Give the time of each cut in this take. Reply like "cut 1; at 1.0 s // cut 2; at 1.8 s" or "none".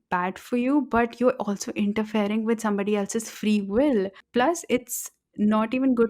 cut 1; at 4.2 s

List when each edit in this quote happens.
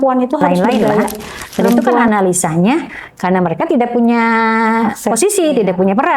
cut 1; at 2.0 s

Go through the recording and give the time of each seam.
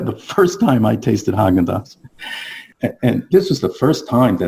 cut 1; at 2.7 s

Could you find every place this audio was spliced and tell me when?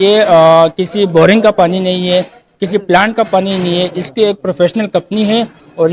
none

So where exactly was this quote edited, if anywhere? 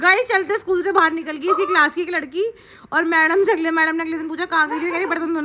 none

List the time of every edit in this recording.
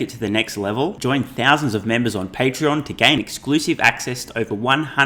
none

